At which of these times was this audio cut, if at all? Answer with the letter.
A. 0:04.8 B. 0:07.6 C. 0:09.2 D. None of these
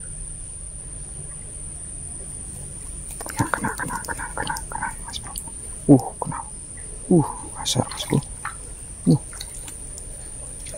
D